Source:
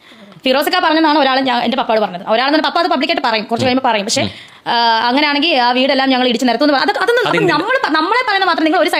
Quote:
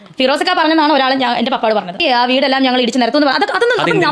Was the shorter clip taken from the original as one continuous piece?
no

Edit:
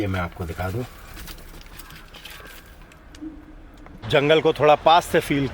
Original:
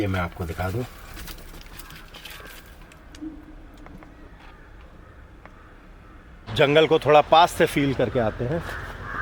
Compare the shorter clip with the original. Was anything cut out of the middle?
yes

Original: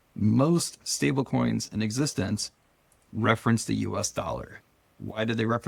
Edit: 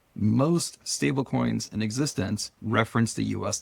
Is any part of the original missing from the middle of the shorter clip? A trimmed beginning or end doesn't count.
yes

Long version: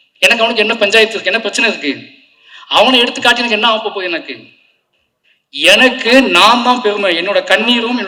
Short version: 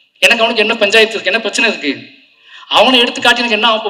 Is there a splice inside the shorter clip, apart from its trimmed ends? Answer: no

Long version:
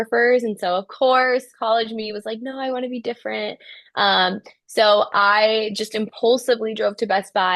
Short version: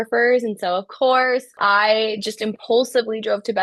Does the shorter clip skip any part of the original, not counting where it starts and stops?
yes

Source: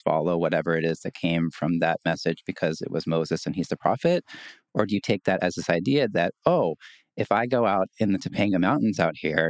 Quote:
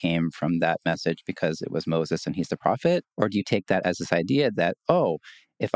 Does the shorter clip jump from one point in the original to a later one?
yes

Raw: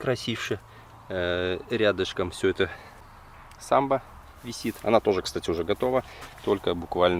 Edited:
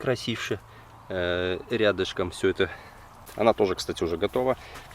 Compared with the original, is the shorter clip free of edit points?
no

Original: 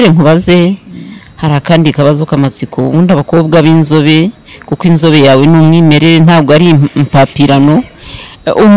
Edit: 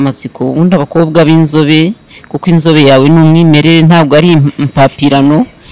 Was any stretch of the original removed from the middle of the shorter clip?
no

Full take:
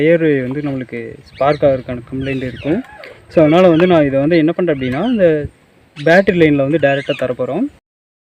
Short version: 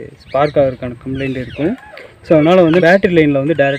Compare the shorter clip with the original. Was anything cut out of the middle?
yes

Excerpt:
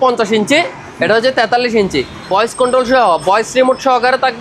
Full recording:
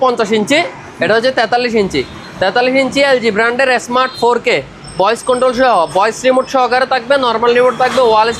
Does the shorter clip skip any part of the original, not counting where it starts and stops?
yes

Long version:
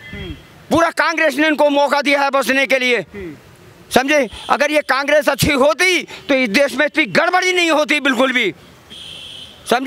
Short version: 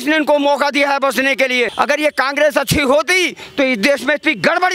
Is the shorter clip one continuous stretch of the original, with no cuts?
no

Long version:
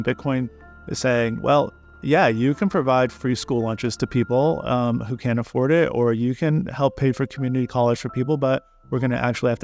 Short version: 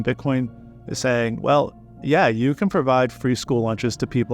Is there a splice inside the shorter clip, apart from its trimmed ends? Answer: no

